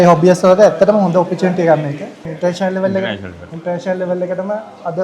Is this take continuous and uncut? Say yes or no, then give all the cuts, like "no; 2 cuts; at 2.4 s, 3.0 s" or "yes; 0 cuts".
no; 1 cut; at 2.2 s